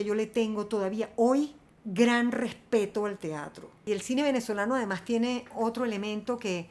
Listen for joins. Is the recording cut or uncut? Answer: cut